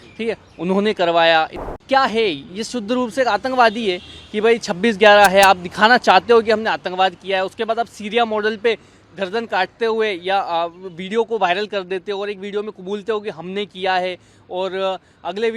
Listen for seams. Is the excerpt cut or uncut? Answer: cut